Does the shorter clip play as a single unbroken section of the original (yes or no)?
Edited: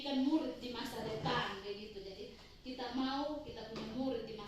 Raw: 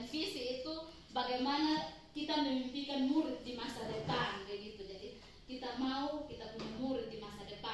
yes